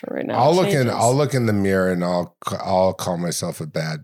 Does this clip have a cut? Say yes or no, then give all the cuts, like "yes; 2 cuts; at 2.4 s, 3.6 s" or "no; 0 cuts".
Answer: no; 0 cuts